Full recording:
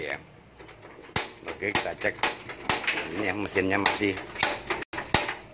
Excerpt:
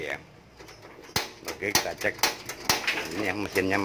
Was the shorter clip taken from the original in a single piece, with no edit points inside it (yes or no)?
yes